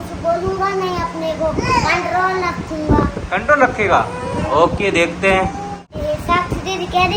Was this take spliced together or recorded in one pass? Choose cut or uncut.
uncut